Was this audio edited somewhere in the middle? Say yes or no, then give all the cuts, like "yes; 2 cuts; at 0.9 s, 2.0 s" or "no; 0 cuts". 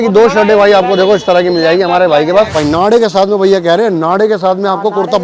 yes; 1 cut; at 2.5 s